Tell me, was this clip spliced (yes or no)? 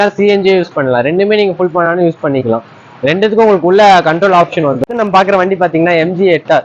yes